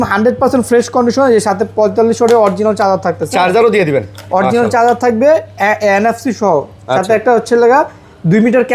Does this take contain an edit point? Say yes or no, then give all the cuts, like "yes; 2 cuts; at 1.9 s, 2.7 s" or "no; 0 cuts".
no; 0 cuts